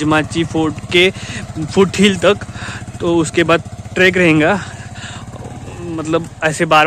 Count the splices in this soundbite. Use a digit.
0